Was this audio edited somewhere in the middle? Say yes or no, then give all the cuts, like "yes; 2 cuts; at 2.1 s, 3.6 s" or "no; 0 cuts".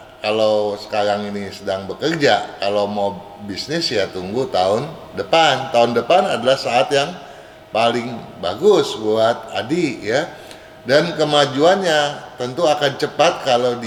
no; 0 cuts